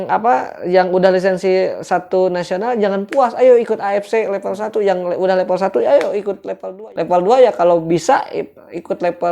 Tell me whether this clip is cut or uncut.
cut